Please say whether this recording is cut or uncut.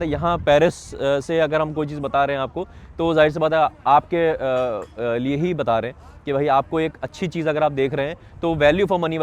uncut